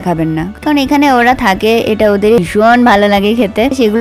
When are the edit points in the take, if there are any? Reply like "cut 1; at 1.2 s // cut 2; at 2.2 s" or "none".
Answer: cut 1; at 2.4 s